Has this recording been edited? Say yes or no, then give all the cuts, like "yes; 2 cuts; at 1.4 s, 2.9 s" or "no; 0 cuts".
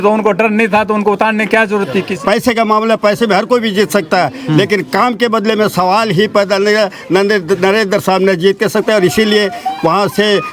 yes; 1 cut; at 2.1 s